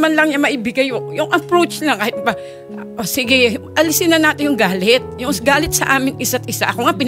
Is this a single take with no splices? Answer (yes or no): yes